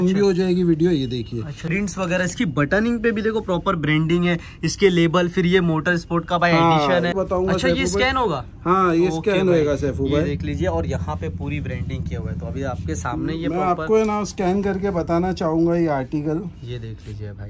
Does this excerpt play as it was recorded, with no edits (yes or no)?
no